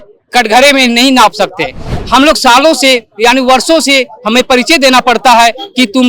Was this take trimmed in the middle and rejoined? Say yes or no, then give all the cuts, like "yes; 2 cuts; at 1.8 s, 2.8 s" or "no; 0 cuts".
yes; 1 cut; at 1.9 s